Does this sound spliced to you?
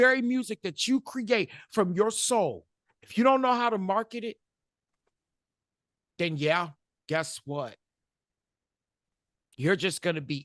no; 0 cuts

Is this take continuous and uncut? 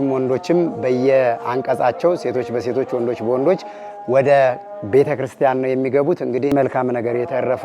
no; 1 cut; at 6.5 s

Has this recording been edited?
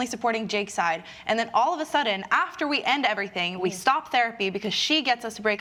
no; 0 cuts

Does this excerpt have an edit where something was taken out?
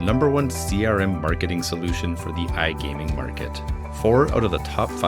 no; 0 cuts

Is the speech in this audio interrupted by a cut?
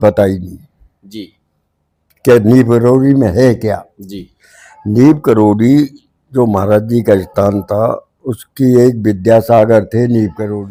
no; 0 cuts

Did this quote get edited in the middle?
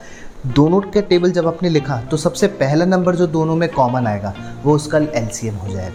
no; 0 cuts

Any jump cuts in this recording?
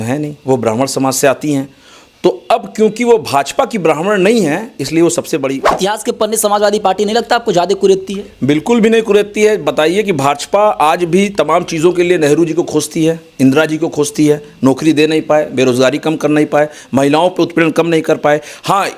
yes; 1 cut; at 5.7 s

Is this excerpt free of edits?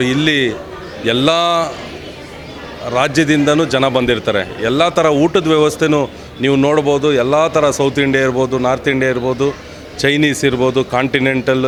yes; 0 cuts

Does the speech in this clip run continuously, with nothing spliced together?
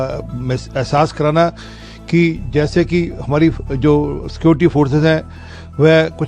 yes; 0 cuts

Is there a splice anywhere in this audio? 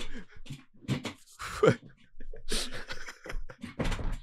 no; 0 cuts

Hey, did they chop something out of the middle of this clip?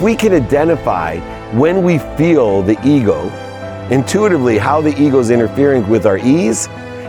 no; 0 cuts

